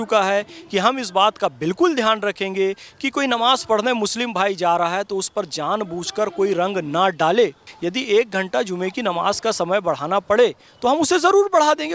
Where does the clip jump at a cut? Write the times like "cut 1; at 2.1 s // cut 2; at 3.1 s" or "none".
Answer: cut 1; at 7.6 s